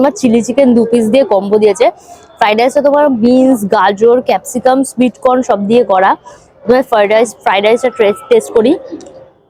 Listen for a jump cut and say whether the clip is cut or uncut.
uncut